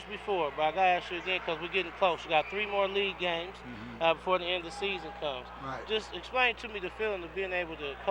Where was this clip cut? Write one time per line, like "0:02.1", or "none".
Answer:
0:01.3